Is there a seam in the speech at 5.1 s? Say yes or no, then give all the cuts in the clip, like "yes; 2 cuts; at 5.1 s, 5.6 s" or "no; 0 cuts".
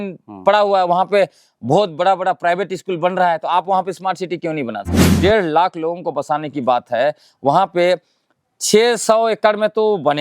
yes; 1 cut; at 5.1 s